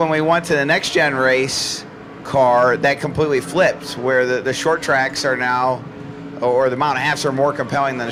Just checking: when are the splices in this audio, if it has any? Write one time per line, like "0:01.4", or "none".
none